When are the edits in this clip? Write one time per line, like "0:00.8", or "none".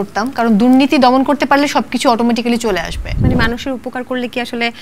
0:03.0